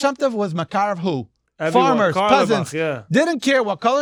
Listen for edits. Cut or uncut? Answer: uncut